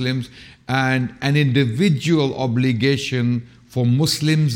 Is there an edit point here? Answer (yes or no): no